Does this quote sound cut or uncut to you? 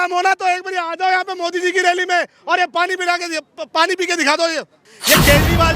cut